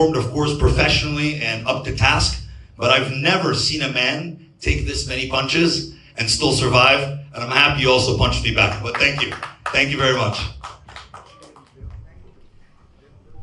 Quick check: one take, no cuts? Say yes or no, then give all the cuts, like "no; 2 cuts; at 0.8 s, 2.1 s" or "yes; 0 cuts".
yes; 0 cuts